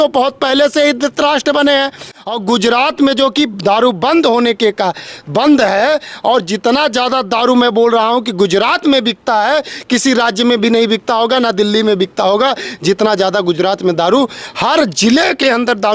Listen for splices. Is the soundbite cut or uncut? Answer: cut